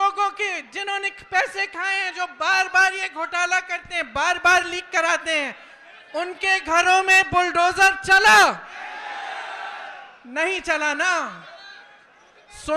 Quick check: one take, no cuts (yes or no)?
yes